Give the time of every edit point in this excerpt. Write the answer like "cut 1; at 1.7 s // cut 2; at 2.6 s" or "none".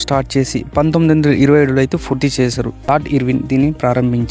cut 1; at 2.9 s